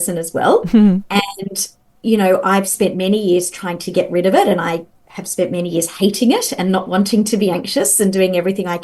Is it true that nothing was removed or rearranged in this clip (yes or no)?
yes